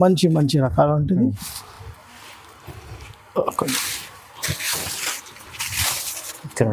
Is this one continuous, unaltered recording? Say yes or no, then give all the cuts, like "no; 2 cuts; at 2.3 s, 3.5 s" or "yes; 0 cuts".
yes; 0 cuts